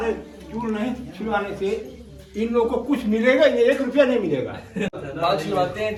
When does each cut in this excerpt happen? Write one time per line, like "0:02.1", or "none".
none